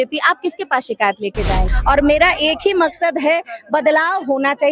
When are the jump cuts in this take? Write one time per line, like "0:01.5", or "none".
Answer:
0:01.7